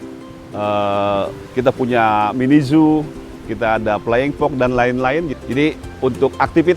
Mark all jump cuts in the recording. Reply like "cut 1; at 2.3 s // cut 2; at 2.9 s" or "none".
cut 1; at 5.3 s